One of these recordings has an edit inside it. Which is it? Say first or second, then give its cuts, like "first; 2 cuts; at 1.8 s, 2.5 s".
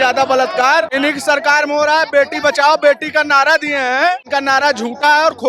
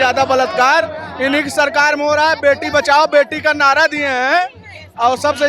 first; 2 cuts; at 0.9 s, 4.2 s